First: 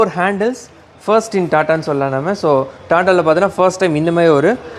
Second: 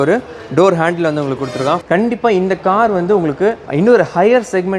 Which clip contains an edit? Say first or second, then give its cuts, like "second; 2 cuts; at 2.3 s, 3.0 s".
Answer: second; 2 cuts; at 1.8 s, 3.6 s